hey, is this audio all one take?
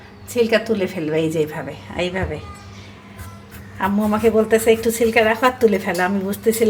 yes; 0 cuts

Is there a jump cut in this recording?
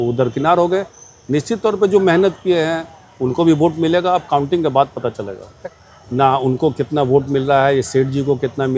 yes; 1 cut; at 5.6 s

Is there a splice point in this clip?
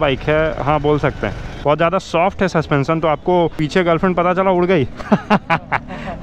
yes; 2 cuts; at 1.6 s, 3.6 s

